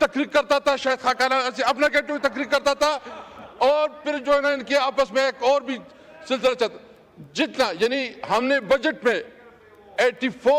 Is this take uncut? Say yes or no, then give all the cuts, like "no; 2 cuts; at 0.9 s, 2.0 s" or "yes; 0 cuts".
yes; 0 cuts